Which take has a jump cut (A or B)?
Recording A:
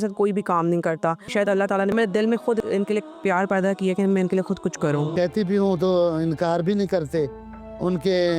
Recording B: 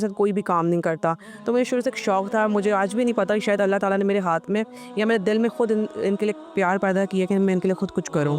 A